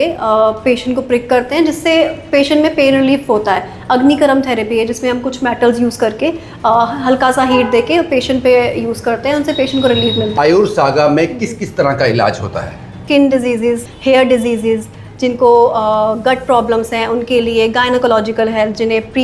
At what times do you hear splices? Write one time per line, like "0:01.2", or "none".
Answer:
0:10.4
0:13.0
0:13.9